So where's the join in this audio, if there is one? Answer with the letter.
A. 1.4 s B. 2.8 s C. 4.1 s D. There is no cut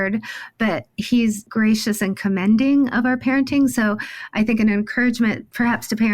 A